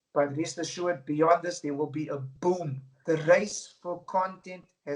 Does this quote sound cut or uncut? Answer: uncut